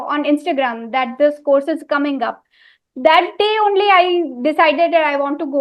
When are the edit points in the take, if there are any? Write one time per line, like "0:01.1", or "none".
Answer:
none